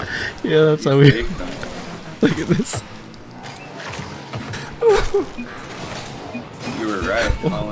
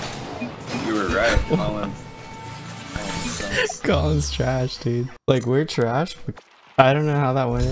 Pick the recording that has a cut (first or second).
second